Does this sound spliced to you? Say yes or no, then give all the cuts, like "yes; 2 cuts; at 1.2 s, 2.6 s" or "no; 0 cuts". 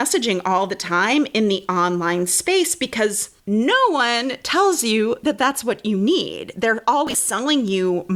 yes; 1 cut; at 3.3 s